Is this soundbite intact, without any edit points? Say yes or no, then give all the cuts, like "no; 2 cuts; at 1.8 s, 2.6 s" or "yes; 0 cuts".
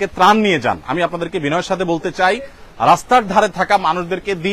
yes; 0 cuts